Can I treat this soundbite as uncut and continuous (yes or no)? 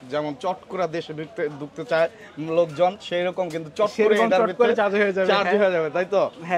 yes